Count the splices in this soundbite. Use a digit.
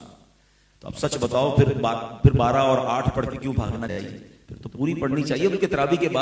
0